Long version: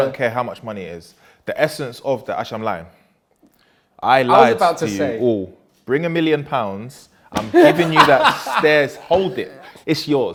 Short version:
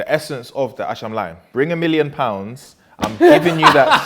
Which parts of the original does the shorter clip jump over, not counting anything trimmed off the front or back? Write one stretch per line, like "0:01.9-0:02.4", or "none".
0:02.9-0:05.7